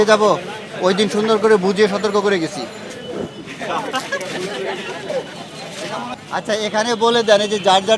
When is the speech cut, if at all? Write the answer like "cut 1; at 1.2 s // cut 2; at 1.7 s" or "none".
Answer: cut 1; at 6.2 s